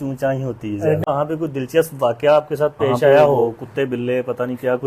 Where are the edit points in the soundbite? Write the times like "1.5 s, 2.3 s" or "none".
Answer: 1.0 s, 3.6 s